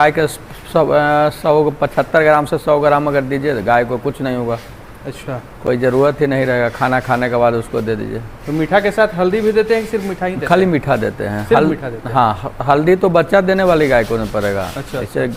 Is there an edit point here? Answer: no; 0 cuts

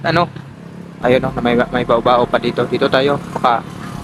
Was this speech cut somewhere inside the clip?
no; 0 cuts

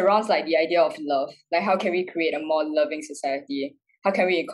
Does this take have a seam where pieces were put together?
no; 0 cuts

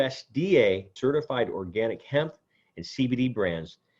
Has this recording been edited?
yes; 1 cut; at 0.9 s

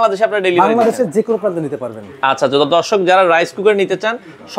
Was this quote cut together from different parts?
no; 0 cuts

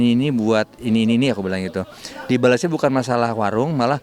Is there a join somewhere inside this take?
no; 0 cuts

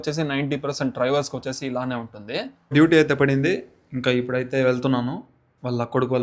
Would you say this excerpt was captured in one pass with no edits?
no; 1 cut; at 2.6 s

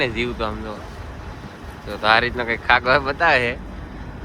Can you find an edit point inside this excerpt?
no; 0 cuts

